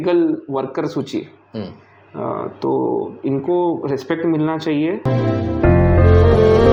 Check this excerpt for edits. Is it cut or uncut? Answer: uncut